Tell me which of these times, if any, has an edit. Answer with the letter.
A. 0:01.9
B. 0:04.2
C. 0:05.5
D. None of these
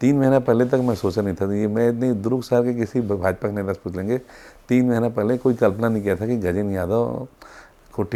D